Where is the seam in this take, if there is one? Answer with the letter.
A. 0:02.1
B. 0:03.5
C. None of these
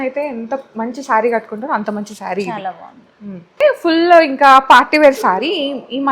B